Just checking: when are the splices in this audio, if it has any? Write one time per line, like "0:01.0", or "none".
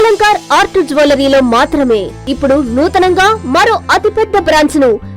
0:02.2